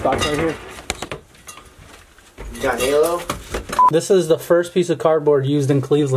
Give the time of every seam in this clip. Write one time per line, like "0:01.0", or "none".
0:03.8